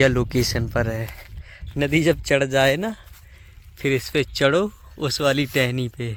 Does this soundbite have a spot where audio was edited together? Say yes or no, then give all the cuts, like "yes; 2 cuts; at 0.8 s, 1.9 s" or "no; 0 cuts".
no; 0 cuts